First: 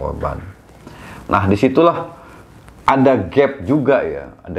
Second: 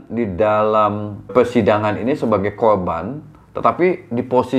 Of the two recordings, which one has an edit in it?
second; 1 cut; at 1.3 s

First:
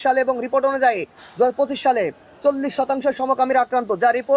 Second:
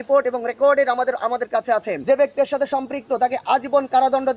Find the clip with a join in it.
second; 1 cut; at 1.9 s

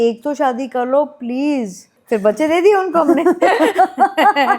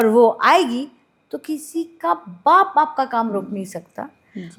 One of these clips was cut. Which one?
first; 1 cut; at 1.9 s

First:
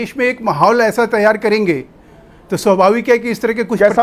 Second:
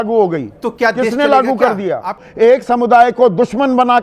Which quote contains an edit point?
second; 1 cut; at 2.2 s

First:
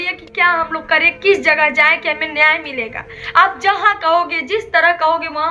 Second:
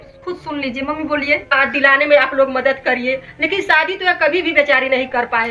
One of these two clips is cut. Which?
second; 1 cut; at 1.5 s

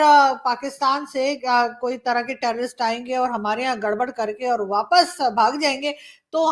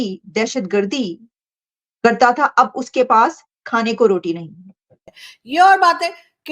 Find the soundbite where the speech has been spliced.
second; 1 cut; at 5.4 s

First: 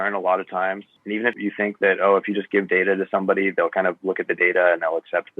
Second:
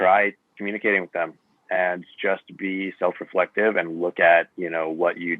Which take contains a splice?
first; 1 cut; at 1.3 s

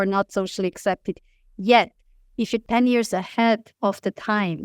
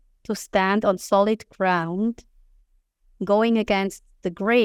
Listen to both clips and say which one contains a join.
first; 2 cuts; at 2.6 s, 3.7 s

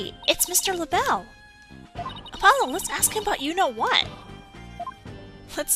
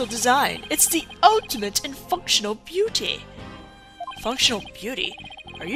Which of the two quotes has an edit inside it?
first; 1 cut; at 2.7 s

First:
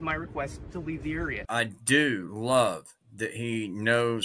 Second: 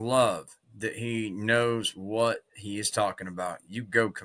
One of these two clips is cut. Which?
first; 1 cut; at 1.4 s

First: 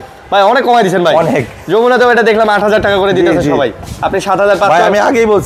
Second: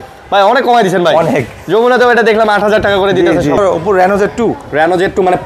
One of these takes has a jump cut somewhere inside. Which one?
second; 1 cut; at 3.6 s

